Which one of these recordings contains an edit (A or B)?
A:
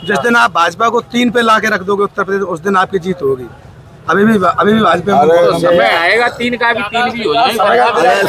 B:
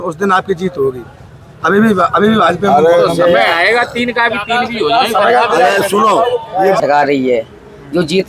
B